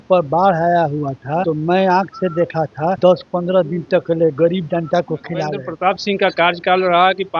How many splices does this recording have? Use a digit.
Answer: 3